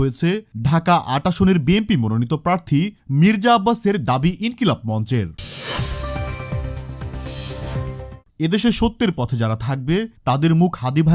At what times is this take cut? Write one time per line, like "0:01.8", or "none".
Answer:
0:05.5
0:08.1